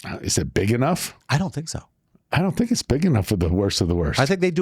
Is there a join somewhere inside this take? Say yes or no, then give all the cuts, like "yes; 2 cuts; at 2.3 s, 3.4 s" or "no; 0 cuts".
yes; 1 cut; at 1.1 s